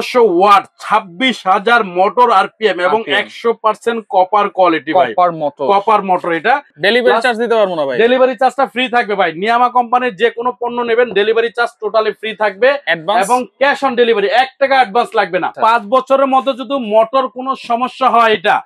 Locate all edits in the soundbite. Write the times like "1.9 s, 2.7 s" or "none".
6.7 s, 15.5 s